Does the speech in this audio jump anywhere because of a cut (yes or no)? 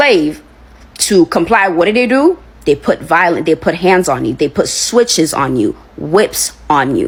no